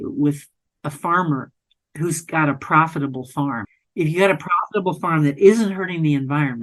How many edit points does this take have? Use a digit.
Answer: 1